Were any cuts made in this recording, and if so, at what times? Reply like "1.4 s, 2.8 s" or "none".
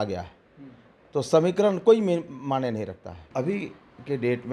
3.3 s